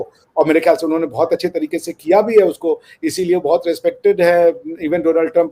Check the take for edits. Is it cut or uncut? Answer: uncut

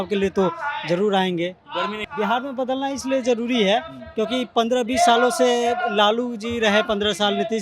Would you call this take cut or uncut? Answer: cut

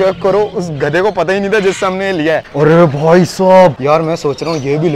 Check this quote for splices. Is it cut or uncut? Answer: cut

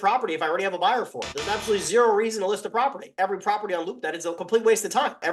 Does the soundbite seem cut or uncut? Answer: cut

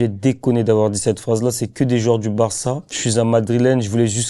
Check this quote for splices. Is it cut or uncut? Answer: cut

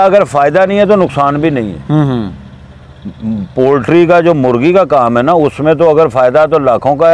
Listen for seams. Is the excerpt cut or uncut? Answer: uncut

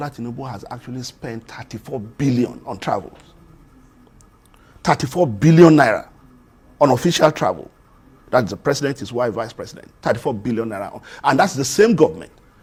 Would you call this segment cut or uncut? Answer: uncut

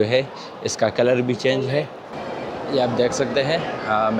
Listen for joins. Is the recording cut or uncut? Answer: cut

